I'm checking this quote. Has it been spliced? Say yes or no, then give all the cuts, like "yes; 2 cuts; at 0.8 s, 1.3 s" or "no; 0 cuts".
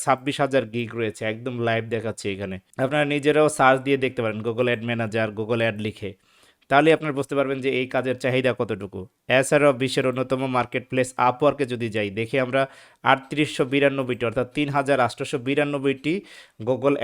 no; 0 cuts